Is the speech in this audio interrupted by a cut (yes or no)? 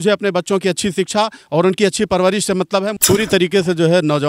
yes